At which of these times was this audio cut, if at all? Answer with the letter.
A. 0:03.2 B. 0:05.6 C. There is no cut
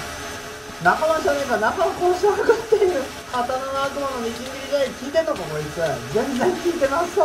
A